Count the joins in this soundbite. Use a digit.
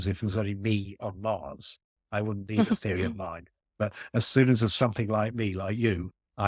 0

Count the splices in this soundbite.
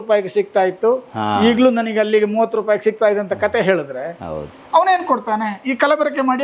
0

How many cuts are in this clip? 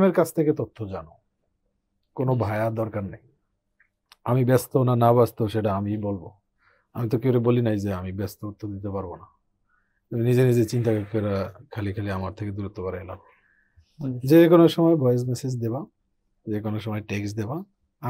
0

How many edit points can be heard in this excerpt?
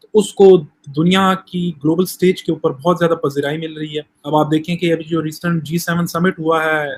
1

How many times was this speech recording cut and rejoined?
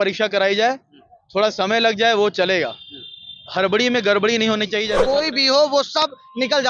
1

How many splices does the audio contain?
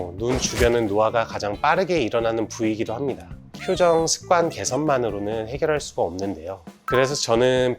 1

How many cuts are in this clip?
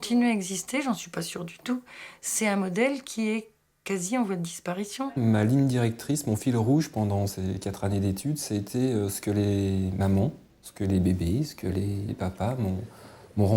2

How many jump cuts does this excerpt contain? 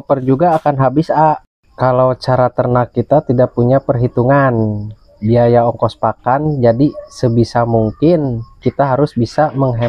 0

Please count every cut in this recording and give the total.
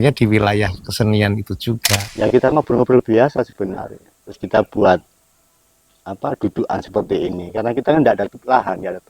1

